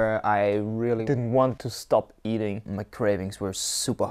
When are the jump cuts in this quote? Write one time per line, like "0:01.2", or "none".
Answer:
0:01.0
0:01.7
0:02.7